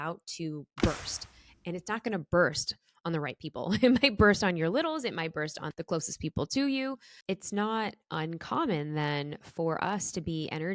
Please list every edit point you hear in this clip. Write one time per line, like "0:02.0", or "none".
0:05.7
0:07.1